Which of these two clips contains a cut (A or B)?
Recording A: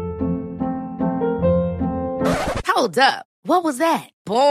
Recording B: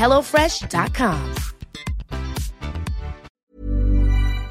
B